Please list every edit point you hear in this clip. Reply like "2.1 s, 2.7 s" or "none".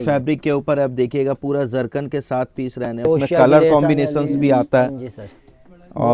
3.0 s